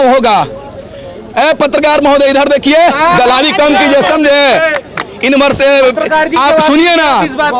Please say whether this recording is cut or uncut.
uncut